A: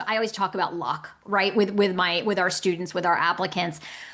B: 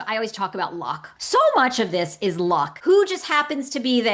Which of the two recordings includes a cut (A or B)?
B